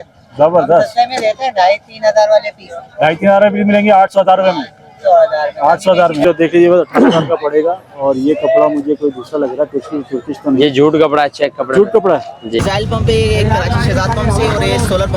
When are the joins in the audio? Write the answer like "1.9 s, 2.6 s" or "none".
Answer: 6.2 s, 12.6 s